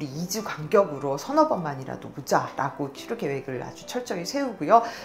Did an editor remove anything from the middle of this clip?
no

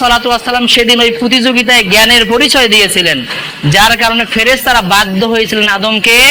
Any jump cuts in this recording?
no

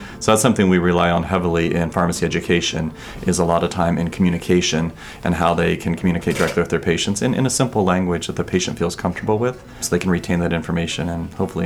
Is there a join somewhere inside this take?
yes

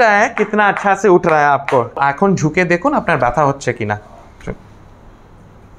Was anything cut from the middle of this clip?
yes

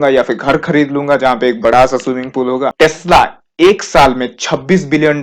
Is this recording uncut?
no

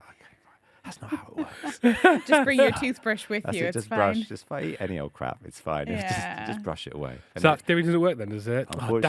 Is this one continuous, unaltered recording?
yes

